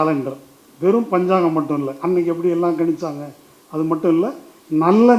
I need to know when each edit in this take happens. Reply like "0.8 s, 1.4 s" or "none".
none